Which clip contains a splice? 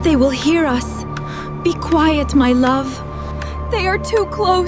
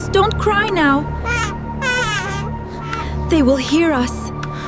first; 1 cut; at 3.3 s

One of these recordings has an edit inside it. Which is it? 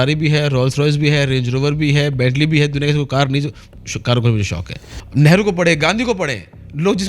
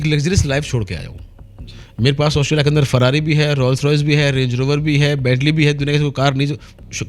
first; 1 cut; at 5.0 s

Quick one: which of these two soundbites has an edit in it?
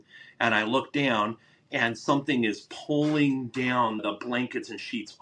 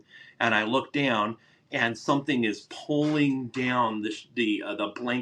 first; 1 cut; at 4.0 s

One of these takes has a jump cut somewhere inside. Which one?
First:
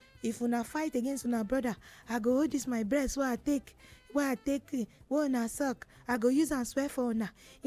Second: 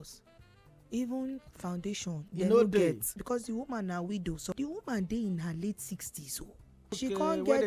second; 4 cuts; at 2.2 s, 3.1 s, 4.5 s, 6.9 s

